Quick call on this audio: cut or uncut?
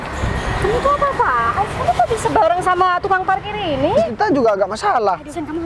cut